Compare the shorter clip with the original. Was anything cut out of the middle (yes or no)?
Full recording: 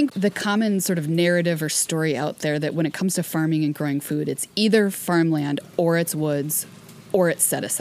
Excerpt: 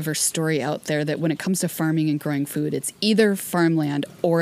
no